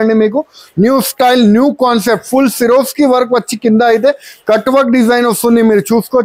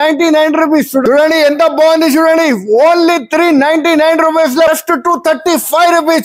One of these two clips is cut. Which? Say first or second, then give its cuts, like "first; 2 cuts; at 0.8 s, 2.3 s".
second; 2 cuts; at 1.0 s, 4.7 s